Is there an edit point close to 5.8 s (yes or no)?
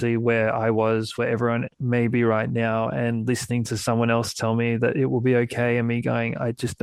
no